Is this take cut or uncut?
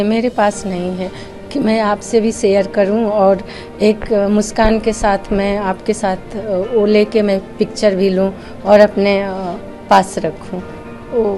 uncut